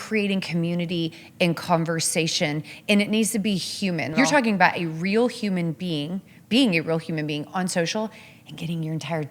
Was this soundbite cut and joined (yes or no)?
yes